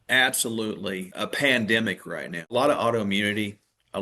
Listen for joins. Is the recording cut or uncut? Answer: cut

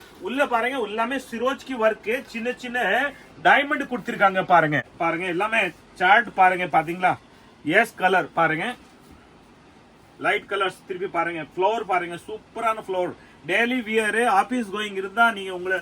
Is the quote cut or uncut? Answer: cut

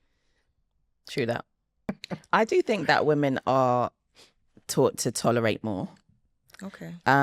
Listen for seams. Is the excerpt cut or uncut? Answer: cut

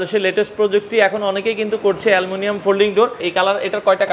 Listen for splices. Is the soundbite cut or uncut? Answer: cut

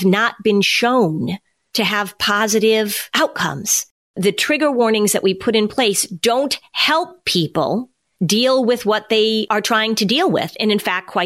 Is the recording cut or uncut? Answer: cut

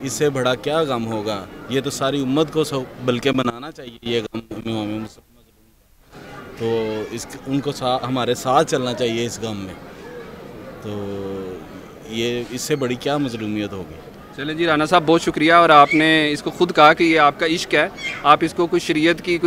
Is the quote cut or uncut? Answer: uncut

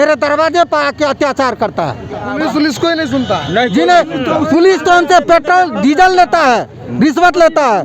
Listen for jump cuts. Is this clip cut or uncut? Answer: cut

